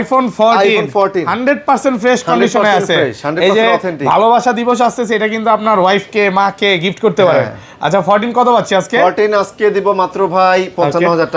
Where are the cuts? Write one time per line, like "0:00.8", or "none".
none